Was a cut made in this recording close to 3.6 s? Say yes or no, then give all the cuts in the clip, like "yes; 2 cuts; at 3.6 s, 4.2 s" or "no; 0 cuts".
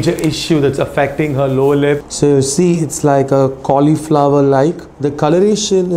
no; 2 cuts; at 2.1 s, 4.9 s